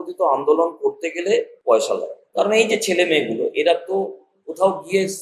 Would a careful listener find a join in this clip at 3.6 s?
no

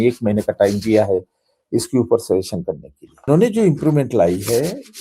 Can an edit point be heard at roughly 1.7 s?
no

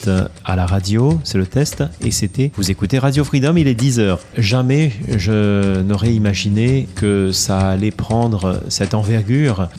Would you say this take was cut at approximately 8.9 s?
no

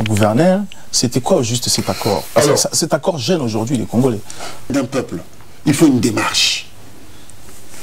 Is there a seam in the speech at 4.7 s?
yes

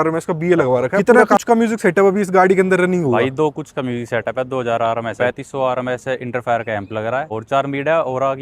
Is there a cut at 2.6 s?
no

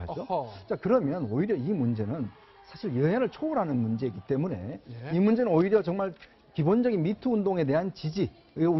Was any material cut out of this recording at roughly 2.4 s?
yes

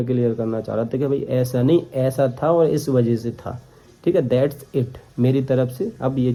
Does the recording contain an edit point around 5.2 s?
no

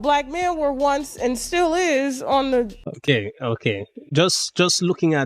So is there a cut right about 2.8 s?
yes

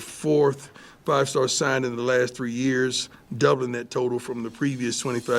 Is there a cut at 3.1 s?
no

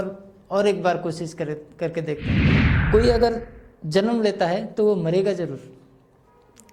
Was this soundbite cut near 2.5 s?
yes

